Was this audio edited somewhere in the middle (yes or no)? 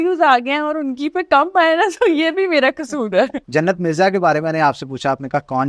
yes